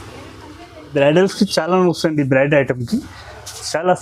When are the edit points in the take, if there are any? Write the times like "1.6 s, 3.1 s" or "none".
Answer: 0.9 s